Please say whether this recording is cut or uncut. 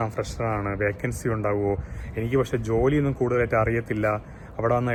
uncut